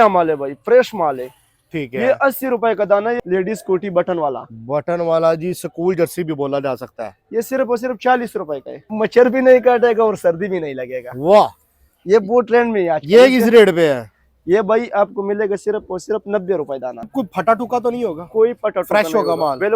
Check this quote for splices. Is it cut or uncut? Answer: cut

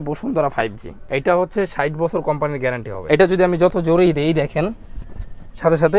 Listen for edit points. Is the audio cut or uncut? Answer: cut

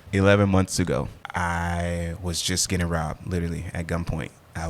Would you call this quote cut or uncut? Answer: cut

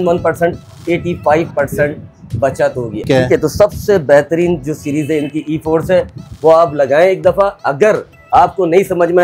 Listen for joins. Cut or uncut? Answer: cut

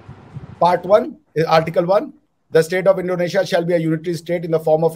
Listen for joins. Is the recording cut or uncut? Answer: uncut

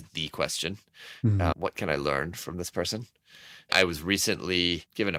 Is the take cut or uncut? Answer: uncut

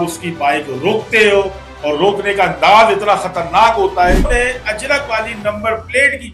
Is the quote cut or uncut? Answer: cut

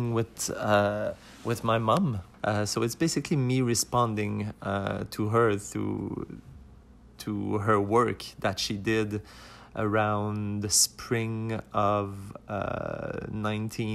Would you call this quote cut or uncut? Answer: cut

